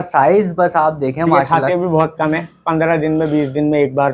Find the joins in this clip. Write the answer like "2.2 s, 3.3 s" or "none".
1.4 s